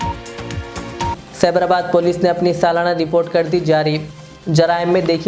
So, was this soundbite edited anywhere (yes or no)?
no